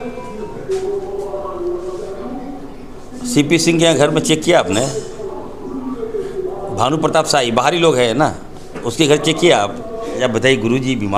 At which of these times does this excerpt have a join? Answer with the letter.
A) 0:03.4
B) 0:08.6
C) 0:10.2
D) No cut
C